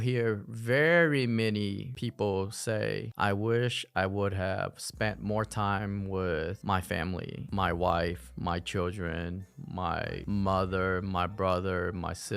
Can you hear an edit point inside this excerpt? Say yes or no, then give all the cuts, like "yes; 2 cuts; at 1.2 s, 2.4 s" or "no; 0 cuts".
no; 0 cuts